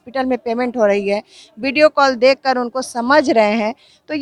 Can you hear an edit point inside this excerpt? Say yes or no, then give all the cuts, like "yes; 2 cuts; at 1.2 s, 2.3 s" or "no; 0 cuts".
no; 0 cuts